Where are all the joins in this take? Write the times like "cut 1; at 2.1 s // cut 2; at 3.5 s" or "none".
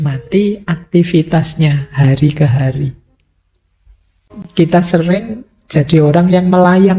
cut 1; at 4.2 s